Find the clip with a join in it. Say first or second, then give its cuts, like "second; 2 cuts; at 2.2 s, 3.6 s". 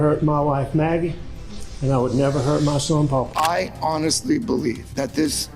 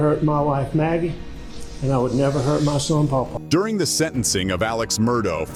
first; 1 cut; at 3.4 s